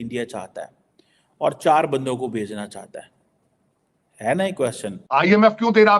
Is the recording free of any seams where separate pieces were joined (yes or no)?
no